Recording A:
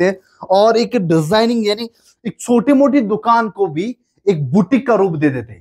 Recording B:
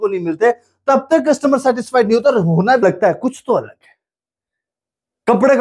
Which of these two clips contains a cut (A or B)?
B